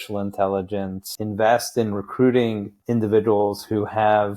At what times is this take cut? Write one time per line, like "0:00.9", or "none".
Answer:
0:01.1
0:02.8